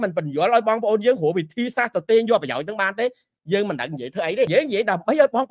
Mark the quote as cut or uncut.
cut